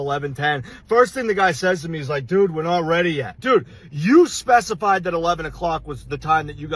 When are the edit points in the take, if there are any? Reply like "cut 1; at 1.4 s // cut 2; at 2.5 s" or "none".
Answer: cut 1; at 3.3 s